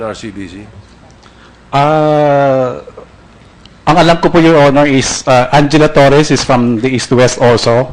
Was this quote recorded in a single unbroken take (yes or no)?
yes